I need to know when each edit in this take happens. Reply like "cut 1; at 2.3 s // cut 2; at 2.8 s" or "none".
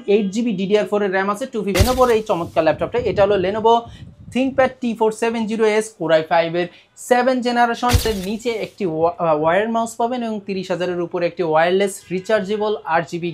cut 1; at 1.7 s // cut 2; at 8.0 s